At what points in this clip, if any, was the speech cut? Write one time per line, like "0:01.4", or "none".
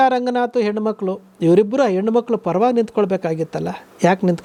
none